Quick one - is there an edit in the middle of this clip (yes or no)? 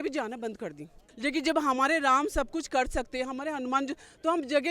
yes